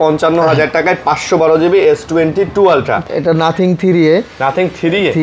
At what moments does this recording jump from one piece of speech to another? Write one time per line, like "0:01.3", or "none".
0:03.0